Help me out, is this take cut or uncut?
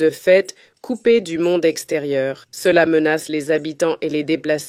cut